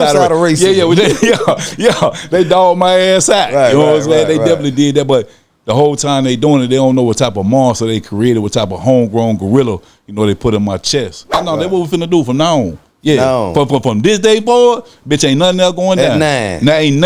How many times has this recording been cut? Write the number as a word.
one